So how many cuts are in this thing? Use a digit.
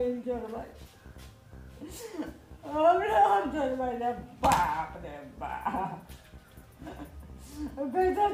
0